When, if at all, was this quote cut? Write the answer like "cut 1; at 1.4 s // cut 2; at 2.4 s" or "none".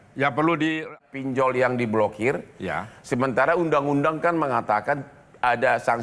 cut 1; at 1.0 s